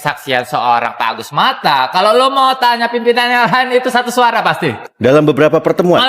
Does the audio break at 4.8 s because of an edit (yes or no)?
yes